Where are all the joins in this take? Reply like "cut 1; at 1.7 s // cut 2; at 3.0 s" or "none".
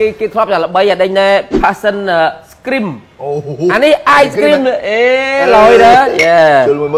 none

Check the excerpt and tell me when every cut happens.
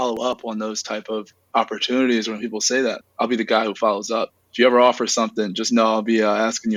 none

